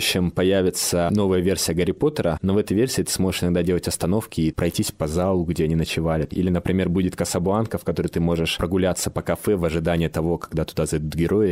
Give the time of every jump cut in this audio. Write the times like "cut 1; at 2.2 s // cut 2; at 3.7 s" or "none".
cut 1; at 1.1 s // cut 2; at 4.5 s // cut 3; at 6.3 s